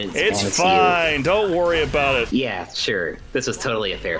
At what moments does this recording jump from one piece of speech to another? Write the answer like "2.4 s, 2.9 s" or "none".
2.3 s